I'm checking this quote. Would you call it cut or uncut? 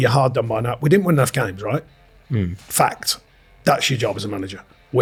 uncut